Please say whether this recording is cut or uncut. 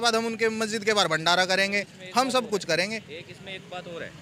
uncut